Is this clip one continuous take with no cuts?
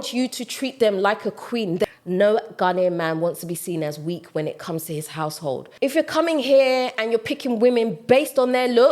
no; 2 cuts; at 1.8 s, 5.7 s

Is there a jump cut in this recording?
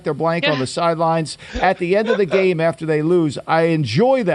no; 0 cuts

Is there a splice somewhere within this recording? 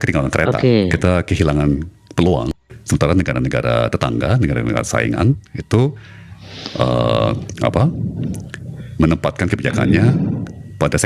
yes; 1 cut; at 2.5 s

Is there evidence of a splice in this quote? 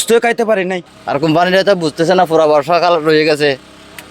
yes; 1 cut; at 0.9 s

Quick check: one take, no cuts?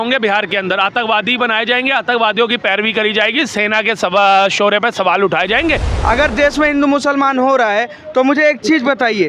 no; 1 cut; at 5.9 s

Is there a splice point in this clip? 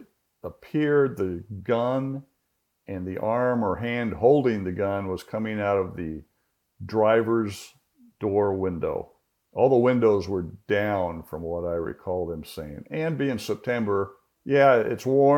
yes; 1 cut; at 14.3 s

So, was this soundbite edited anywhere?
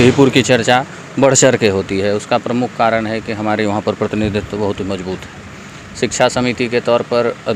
no; 0 cuts

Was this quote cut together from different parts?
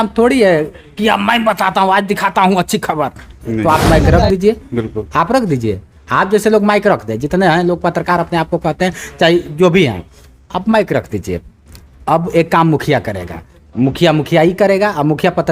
no; 0 cuts

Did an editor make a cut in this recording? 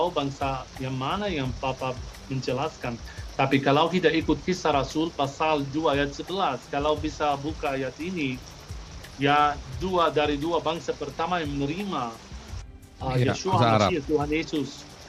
no; 0 cuts

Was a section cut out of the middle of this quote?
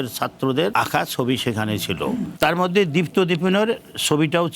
yes; 2 cuts; at 0.7 s, 2.3 s

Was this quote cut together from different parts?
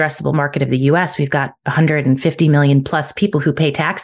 no; 0 cuts

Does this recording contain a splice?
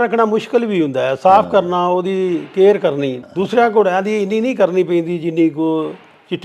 yes; 1 cut; at 3.2 s

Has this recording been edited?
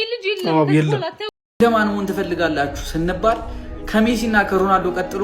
yes; 1 cut; at 1.3 s

